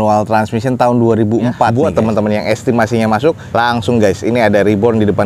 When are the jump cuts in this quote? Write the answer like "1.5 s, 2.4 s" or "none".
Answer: 1.7 s